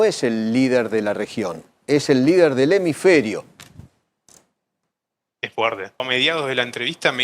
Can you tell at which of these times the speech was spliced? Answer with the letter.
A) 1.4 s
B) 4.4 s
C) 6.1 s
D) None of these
C